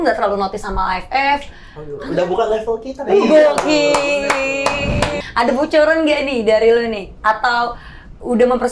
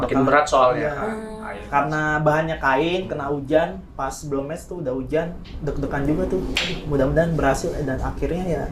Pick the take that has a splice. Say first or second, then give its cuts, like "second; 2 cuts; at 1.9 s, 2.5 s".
first; 1 cut; at 5.2 s